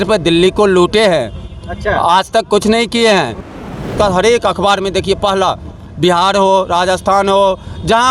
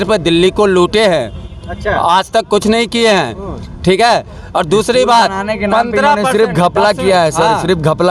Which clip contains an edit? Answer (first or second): first